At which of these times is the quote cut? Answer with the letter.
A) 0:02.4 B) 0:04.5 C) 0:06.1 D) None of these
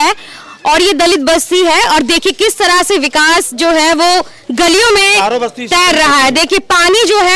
D